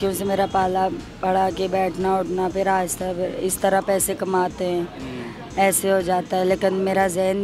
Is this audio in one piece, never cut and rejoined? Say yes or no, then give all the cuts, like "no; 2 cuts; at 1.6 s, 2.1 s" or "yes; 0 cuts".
yes; 0 cuts